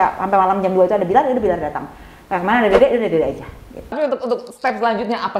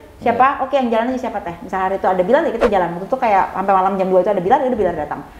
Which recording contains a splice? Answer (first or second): first